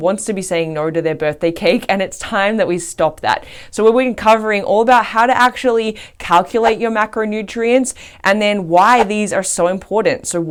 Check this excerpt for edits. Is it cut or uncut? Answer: uncut